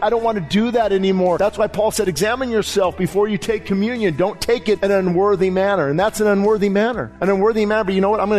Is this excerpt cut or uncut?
cut